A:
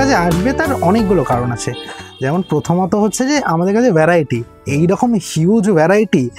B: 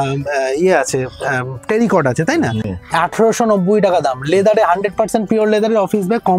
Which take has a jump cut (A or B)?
B